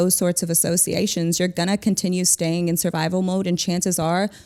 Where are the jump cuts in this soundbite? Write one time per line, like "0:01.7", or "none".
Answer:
none